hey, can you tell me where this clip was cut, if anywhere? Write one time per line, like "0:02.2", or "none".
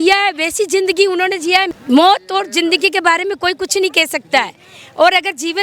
0:01.7